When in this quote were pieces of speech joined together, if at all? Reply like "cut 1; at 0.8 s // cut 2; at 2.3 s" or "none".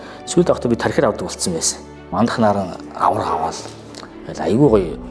cut 1; at 2.1 s

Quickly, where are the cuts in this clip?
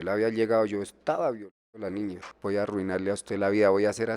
cut 1; at 2.3 s

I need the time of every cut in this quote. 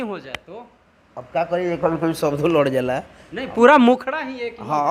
none

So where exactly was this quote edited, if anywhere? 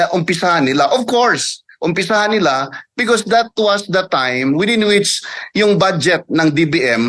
none

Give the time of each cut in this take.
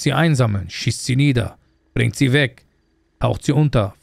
none

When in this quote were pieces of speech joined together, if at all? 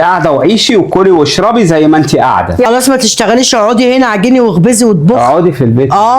cut 1; at 2.7 s

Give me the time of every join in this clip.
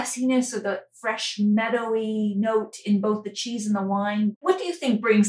cut 1; at 4.3 s

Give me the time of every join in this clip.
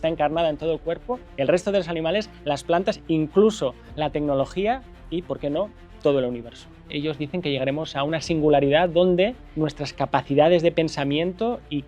cut 1; at 1.2 s // cut 2; at 3.8 s // cut 3; at 6.9 s // cut 4; at 9.4 s

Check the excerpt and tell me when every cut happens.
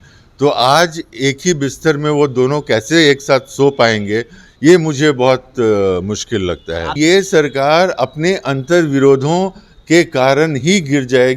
cut 1; at 6.9 s

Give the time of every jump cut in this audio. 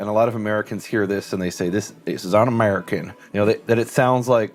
none

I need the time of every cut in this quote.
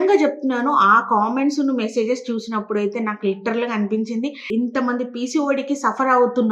cut 1; at 4.5 s

